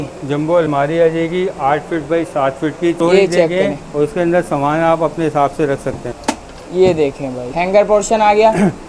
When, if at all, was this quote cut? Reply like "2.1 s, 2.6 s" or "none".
3.0 s, 6.1 s, 7.4 s